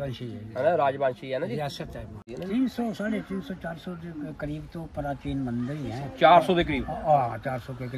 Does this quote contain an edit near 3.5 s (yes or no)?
no